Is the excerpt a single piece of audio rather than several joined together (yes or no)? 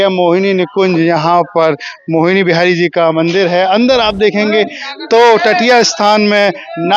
yes